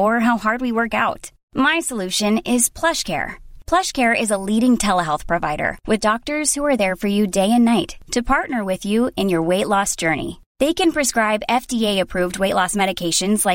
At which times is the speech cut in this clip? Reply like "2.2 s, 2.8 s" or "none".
none